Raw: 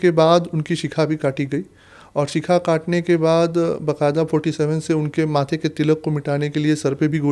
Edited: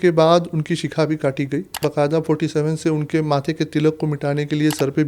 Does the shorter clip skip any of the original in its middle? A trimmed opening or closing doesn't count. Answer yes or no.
yes